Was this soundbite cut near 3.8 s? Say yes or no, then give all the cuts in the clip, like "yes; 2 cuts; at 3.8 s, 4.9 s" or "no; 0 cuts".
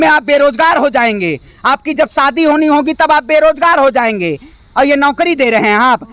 no; 0 cuts